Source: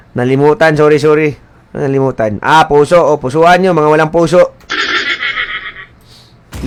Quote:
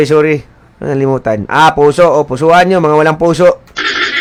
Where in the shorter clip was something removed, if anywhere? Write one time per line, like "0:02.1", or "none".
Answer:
none